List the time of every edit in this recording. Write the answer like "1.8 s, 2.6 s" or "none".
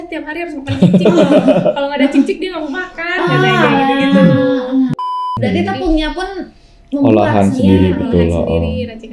4.9 s